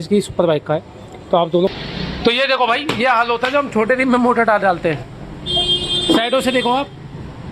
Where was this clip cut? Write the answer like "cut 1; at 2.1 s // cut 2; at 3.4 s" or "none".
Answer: cut 1; at 1.7 s